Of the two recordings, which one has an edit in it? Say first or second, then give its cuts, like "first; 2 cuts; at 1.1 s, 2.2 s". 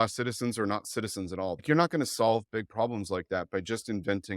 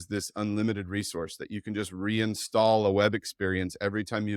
first; 1 cut; at 1.6 s